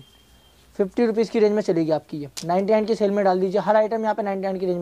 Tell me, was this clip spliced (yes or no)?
no